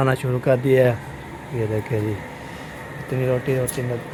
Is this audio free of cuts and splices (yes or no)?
yes